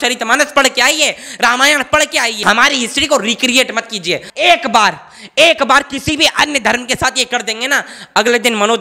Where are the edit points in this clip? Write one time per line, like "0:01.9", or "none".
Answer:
0:02.4
0:04.3